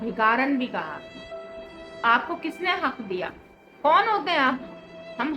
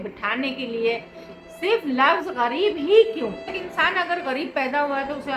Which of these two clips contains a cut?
second; 1 cut; at 3.6 s

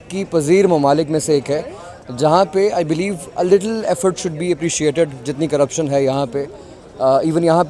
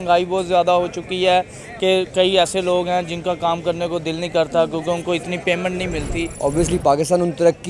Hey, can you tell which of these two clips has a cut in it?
second; 1 cut; at 6.3 s

